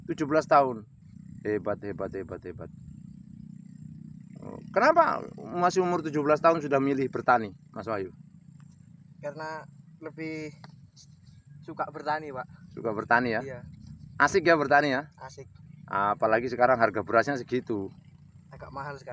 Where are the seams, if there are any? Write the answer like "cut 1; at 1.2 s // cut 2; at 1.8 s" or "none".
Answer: none

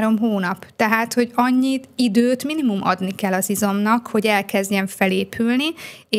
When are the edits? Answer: none

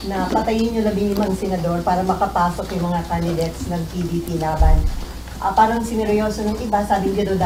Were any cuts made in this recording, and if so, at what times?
none

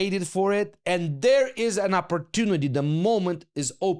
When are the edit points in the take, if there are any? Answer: none

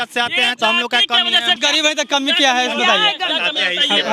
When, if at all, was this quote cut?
cut 1; at 1.6 s

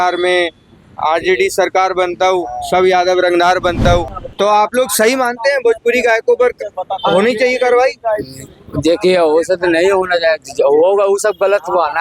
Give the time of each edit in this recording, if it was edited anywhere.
cut 1; at 4.1 s

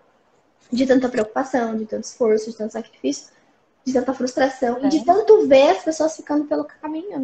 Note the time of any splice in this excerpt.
none

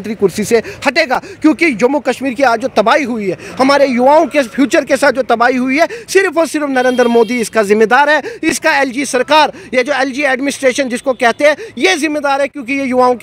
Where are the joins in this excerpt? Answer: none

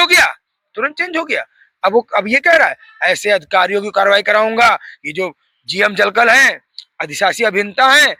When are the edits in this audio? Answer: none

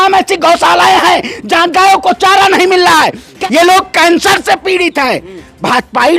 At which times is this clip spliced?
cut 1; at 3.3 s

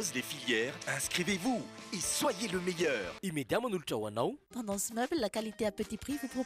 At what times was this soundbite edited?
cut 1; at 4.5 s

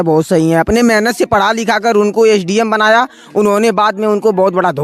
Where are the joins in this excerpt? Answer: none

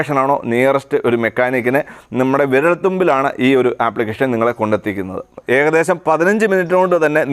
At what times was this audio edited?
cut 1; at 5.4 s

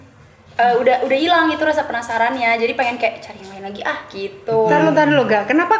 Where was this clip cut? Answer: none

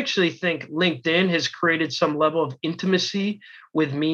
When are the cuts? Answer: none

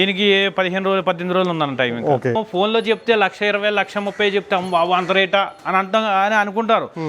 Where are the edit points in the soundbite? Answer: cut 1; at 2.4 s

